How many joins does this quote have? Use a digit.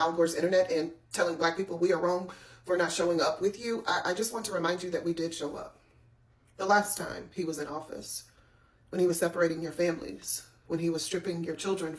0